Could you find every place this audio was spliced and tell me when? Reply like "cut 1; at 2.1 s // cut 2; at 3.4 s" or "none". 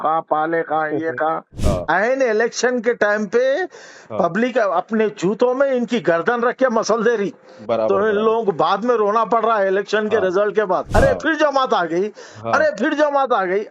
cut 1; at 1.5 s